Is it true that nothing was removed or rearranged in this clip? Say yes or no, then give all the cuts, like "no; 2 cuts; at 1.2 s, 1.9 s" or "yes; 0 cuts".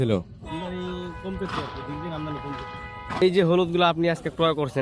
no; 1 cut; at 3.2 s